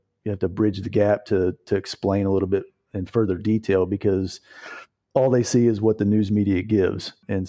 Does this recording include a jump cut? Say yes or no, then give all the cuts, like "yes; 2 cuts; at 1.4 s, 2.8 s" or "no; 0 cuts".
no; 0 cuts